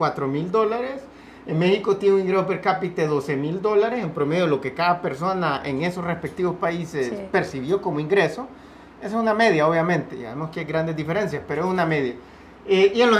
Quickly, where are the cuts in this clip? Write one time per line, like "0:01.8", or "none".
none

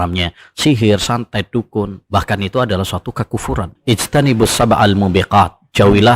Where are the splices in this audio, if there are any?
0:02.0
0:03.7

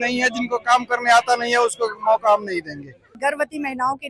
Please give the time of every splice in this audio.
0:03.1

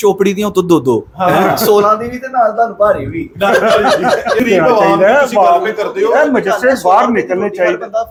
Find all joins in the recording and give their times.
none

